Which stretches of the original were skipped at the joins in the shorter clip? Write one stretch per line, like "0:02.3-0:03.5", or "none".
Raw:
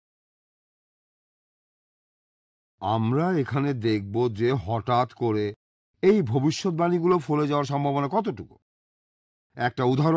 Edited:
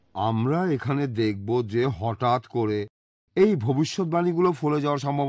none